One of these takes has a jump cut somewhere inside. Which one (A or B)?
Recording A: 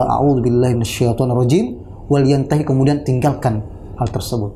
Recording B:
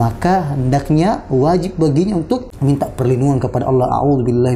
B